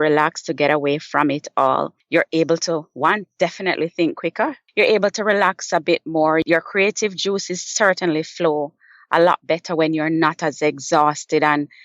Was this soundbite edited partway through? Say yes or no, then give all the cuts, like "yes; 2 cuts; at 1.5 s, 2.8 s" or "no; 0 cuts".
yes; 3 cuts; at 2.0 s, 4.6 s, 6.4 s